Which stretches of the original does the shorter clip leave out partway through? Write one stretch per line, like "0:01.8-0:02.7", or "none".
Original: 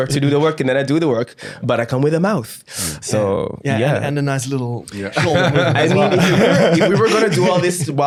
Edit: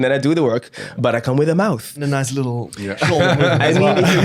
0:02.6-0:04.1